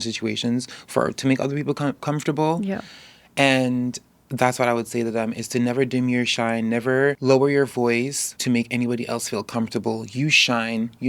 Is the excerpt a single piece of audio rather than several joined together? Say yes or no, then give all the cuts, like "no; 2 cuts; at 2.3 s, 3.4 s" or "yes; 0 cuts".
no; 2 cuts; at 7.2 s, 8.3 s